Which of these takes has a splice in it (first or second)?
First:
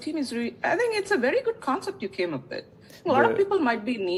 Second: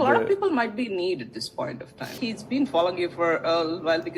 second